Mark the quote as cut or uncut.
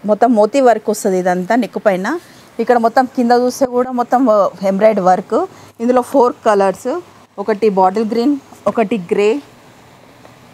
uncut